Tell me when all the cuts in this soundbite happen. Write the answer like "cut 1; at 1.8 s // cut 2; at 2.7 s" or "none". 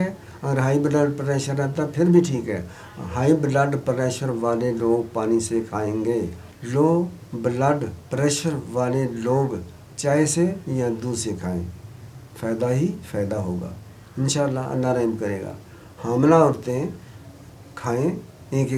none